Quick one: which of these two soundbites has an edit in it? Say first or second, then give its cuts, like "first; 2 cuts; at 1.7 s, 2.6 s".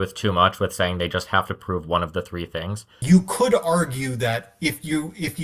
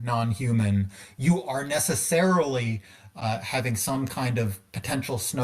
first; 1 cut; at 2.9 s